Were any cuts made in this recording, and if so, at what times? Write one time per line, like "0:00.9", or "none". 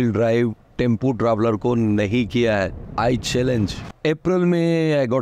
0:02.8
0:03.8